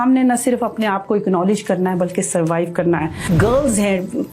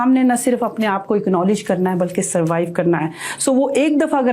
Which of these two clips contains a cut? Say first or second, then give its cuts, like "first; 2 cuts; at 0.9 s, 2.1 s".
first; 1 cut; at 3.1 s